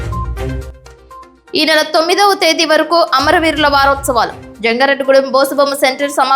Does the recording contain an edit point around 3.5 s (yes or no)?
no